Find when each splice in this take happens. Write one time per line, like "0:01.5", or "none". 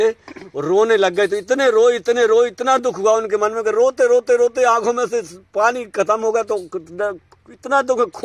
none